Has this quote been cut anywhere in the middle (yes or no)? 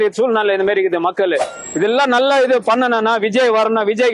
yes